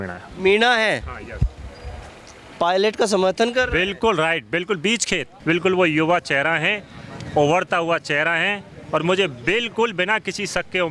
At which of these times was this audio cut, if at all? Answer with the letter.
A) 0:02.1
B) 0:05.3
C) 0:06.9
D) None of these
B